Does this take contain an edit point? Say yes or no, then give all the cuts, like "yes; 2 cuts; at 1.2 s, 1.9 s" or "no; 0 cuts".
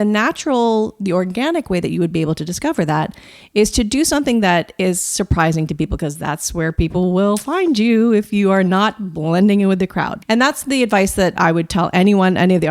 no; 0 cuts